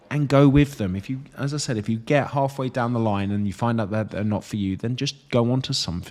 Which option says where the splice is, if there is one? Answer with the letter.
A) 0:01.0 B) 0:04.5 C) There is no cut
C